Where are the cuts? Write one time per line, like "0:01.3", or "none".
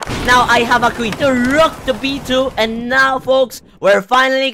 0:01.1

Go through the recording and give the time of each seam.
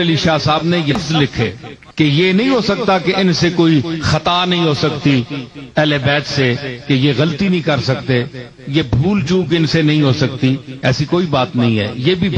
0:00.9

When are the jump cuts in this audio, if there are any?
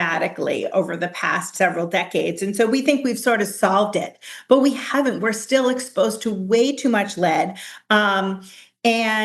none

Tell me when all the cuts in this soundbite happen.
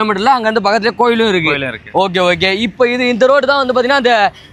none

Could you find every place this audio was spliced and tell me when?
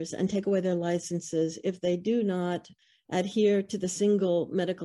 0:02.7

